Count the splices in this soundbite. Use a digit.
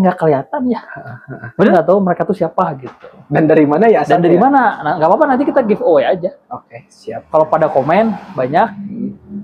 1